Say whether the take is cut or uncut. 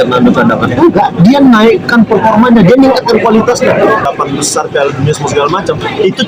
cut